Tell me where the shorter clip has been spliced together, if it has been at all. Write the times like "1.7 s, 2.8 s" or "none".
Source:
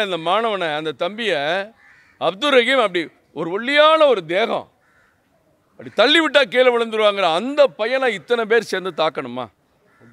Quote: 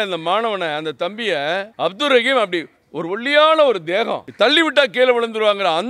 1.7 s, 4.2 s